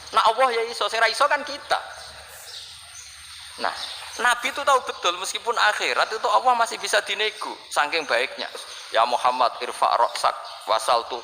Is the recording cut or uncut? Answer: cut